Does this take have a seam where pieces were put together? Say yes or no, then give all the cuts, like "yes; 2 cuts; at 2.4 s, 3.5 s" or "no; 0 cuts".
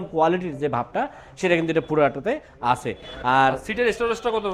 no; 0 cuts